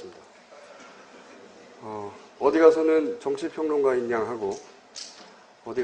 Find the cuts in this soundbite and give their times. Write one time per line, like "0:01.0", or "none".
0:01.1